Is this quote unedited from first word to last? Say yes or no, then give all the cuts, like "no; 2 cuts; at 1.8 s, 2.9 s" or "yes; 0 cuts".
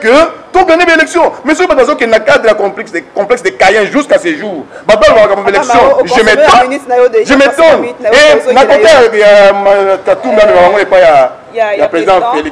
yes; 0 cuts